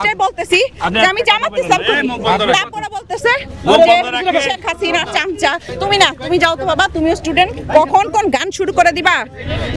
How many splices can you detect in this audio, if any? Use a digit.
1